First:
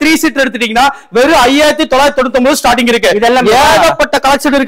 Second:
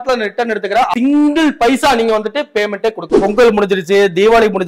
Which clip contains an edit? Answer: second; 2 cuts; at 0.9 s, 3.2 s

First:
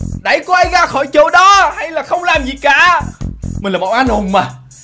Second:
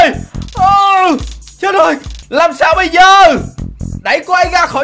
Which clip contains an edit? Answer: second; 1 cut; at 2.1 s

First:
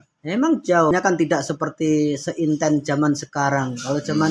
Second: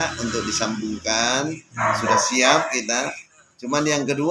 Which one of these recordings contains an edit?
first; 1 cut; at 0.9 s

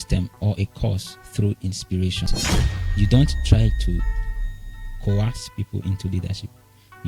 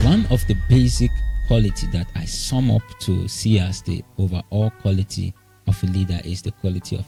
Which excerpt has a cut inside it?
first; 1 cut; at 2.4 s

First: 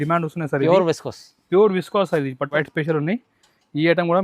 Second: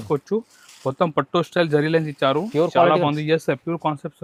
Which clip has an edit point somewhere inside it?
first; 1 cut; at 2.5 s

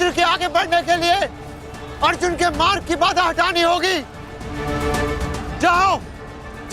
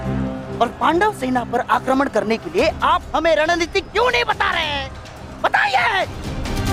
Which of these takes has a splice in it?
first; 1 cut; at 4.5 s

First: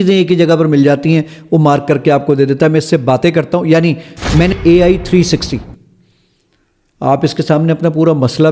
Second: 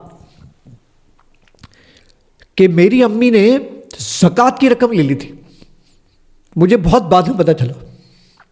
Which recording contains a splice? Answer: first; 1 cut; at 4.5 s

